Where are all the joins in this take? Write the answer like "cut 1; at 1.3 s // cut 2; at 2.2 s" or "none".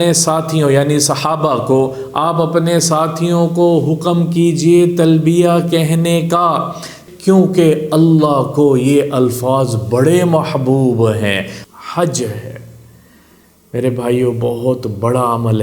cut 1; at 7.0 s // cut 2; at 11.6 s